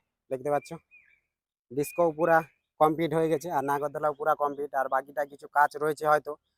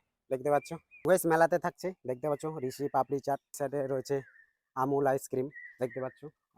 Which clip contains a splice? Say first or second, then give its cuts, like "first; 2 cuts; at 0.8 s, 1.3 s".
second; 2 cuts; at 0.9 s, 3.5 s